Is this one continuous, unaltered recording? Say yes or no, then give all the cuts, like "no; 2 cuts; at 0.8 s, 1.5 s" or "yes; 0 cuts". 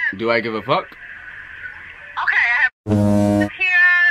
yes; 0 cuts